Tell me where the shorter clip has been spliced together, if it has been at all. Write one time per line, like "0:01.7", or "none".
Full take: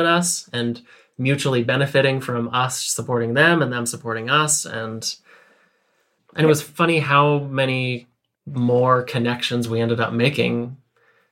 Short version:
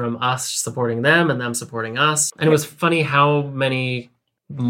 0:02.3